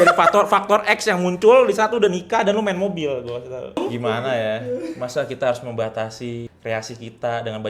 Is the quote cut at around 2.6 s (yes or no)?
no